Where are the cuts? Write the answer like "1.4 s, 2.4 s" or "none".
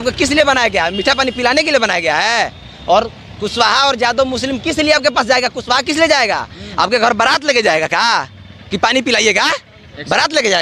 none